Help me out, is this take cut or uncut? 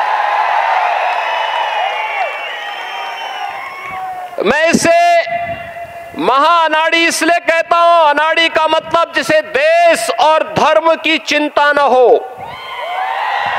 uncut